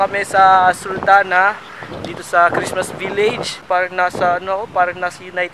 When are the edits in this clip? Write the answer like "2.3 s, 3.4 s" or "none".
3.6 s